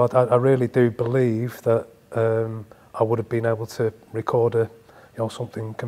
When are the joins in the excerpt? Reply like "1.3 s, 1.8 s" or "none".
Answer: none